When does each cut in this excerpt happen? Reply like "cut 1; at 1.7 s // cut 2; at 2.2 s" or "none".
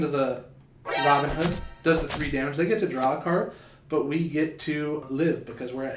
cut 1; at 5.1 s